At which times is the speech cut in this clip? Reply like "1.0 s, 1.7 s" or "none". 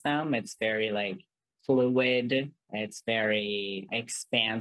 2.6 s, 3.9 s

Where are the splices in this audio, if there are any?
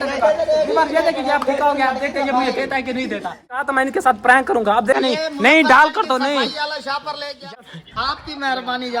3.6 s, 5.0 s, 7.5 s

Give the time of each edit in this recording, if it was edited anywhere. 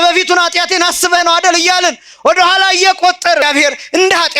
3.4 s

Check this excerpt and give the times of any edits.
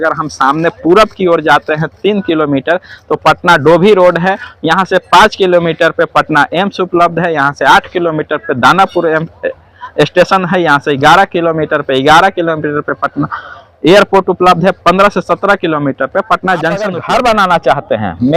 17.0 s

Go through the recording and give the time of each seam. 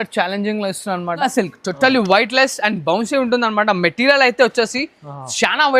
1.2 s

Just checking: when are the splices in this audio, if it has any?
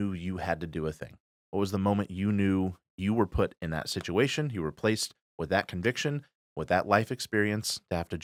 none

